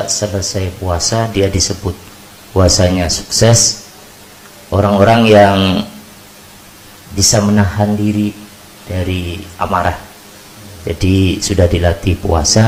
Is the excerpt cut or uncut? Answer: uncut